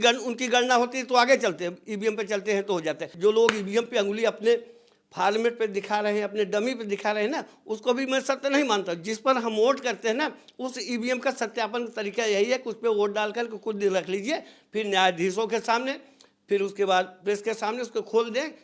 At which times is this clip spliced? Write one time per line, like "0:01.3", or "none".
0:03.1